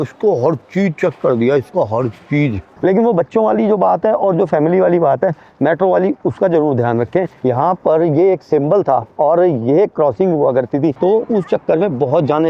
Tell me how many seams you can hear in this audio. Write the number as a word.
three